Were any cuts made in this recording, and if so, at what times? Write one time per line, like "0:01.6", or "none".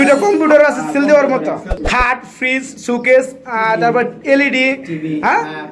0:01.7